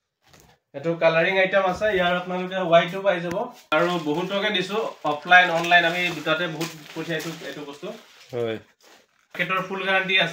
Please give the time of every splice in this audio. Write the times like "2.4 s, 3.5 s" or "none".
3.7 s, 9.4 s